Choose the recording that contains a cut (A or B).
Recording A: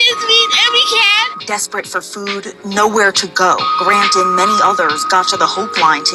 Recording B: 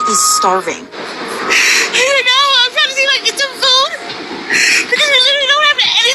B